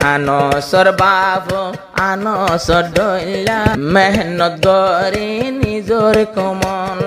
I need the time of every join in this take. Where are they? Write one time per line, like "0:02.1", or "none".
0:03.7